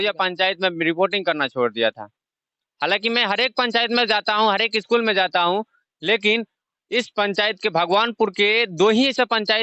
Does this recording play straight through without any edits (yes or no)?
yes